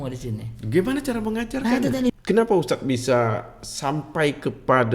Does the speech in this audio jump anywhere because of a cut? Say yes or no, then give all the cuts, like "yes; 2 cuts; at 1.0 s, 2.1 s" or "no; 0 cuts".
yes; 1 cut; at 2.1 s